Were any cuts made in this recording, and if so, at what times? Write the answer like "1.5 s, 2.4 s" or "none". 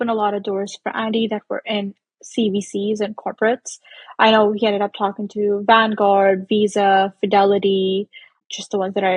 none

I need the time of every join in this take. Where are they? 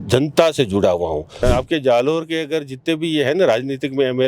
1.3 s

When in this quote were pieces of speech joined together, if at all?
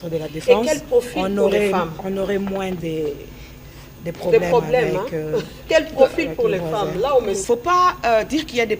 7.4 s

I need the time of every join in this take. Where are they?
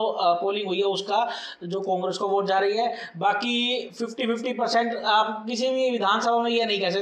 none

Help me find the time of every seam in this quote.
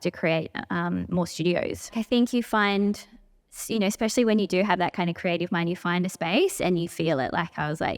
2.0 s

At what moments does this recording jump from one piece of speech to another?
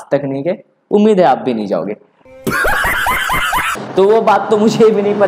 3.8 s

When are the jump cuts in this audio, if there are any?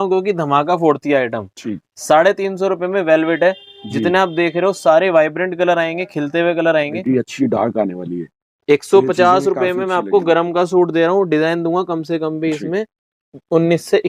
7.0 s

